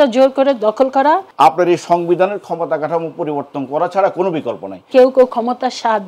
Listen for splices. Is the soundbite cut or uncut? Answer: cut